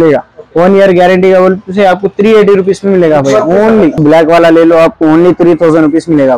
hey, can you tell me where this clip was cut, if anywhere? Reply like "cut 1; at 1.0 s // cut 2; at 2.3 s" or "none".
cut 1; at 4.0 s